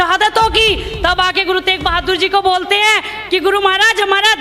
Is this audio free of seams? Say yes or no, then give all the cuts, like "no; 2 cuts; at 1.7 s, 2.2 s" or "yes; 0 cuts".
yes; 0 cuts